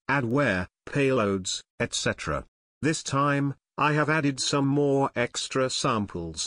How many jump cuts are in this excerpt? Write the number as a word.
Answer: one